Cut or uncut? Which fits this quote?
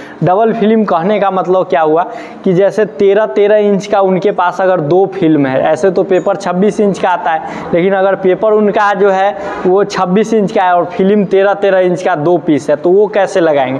uncut